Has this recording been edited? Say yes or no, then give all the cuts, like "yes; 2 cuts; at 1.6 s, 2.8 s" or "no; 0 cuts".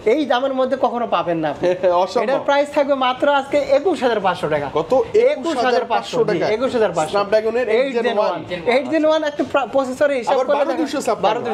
no; 0 cuts